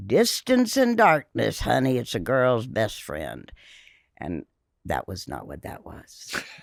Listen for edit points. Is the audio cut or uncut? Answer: uncut